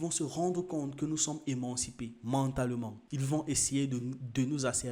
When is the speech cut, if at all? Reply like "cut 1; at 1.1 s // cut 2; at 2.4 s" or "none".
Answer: none

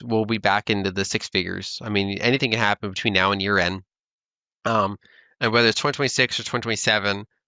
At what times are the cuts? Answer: none

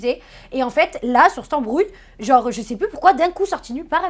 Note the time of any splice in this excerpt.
none

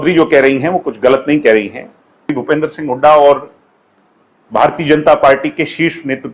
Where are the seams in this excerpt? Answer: cut 1; at 2.3 s

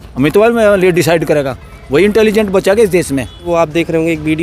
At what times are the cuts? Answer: cut 1; at 3.5 s

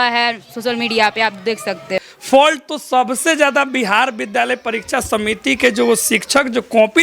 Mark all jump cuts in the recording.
cut 1; at 2.1 s

